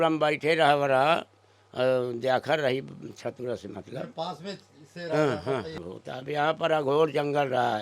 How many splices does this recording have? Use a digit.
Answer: 1